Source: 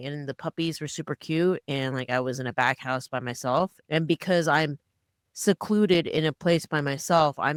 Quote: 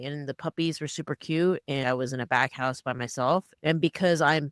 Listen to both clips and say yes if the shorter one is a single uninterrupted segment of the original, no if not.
no